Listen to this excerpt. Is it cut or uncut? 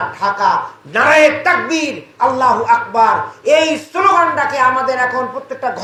uncut